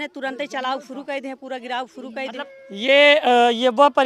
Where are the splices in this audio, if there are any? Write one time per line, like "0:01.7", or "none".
0:02.5